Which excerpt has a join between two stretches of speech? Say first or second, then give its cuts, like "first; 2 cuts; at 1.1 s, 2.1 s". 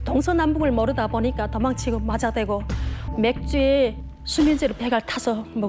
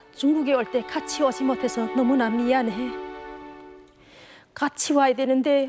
first; 1 cut; at 2.9 s